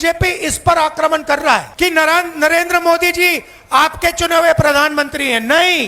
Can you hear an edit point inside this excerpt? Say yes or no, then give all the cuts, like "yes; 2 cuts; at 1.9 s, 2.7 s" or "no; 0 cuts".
yes; 1 cut; at 1.7 s